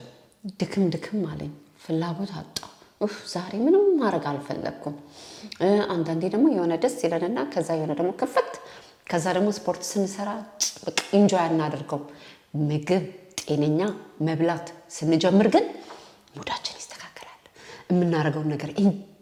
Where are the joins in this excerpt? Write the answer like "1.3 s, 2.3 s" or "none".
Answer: none